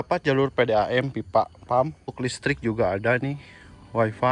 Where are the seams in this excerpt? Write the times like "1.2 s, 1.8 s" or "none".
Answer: 2.0 s